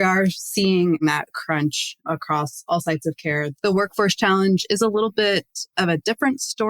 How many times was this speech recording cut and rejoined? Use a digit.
1